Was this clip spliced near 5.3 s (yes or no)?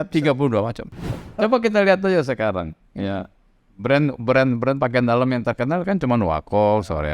no